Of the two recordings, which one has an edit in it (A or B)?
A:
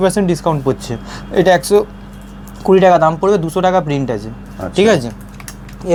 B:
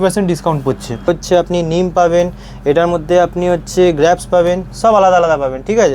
B